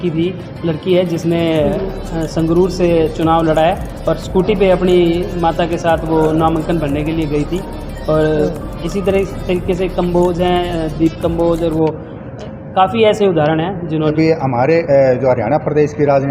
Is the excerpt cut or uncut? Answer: cut